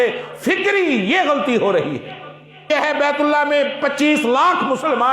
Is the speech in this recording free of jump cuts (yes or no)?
no